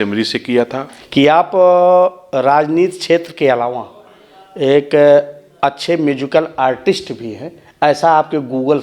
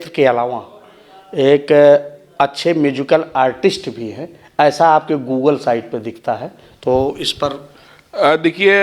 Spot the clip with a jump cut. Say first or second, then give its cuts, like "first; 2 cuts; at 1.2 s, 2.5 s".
first; 1 cut; at 1.0 s